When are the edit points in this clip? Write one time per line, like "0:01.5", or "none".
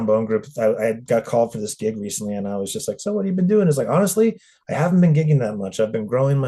none